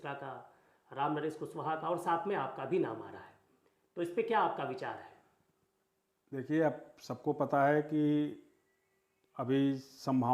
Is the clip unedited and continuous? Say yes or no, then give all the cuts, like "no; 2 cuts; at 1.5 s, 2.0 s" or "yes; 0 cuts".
yes; 0 cuts